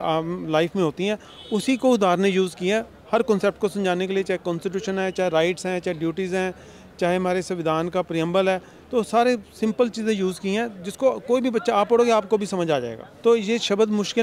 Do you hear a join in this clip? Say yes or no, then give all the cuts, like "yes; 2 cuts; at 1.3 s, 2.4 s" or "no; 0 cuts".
yes; 1 cut; at 13.0 s